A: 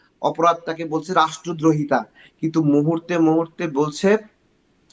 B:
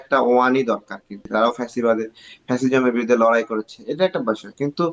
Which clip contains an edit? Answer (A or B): B